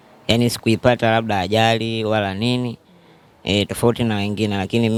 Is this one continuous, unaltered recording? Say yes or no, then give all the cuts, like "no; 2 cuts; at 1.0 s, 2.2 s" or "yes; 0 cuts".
yes; 0 cuts